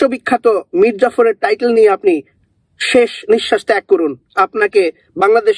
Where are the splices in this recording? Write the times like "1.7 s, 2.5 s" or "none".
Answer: none